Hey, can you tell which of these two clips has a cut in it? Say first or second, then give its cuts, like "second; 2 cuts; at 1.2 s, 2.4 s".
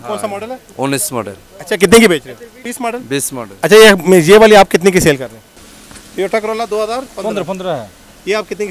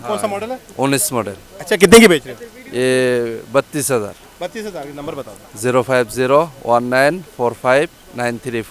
first; 2 cuts; at 2.6 s, 5.5 s